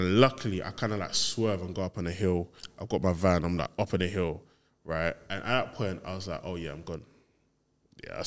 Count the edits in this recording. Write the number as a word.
zero